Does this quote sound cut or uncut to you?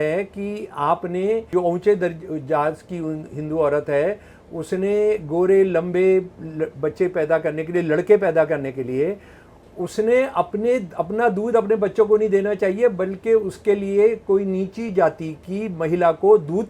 cut